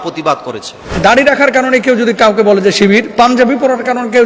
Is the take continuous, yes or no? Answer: no